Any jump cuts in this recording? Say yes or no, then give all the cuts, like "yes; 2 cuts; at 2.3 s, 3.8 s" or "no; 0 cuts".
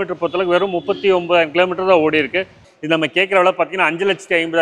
yes; 1 cut; at 2.6 s